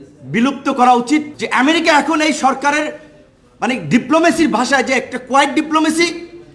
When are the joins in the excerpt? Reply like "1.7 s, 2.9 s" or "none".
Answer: 1.3 s